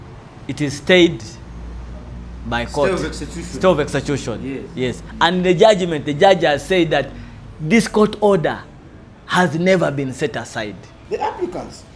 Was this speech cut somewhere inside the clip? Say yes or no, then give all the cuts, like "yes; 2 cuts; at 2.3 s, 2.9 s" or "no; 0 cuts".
yes; 1 cut; at 10.9 s